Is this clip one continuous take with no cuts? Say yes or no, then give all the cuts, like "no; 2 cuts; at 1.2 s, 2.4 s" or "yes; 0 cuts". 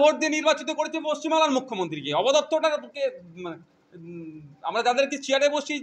yes; 0 cuts